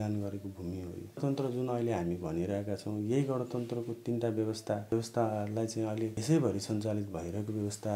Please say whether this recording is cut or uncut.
cut